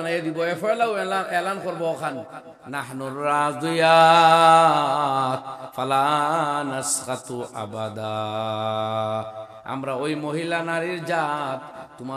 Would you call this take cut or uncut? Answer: uncut